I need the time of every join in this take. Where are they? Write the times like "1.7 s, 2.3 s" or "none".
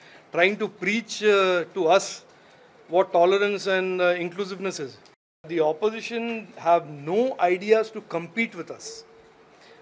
5.5 s